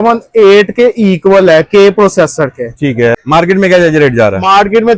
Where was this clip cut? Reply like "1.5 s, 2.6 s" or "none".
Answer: 3.2 s